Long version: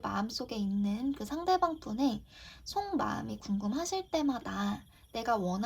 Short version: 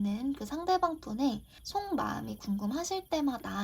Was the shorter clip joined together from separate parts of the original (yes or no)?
yes